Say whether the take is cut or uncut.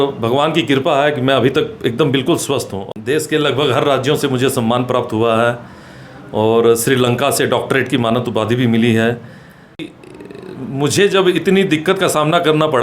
cut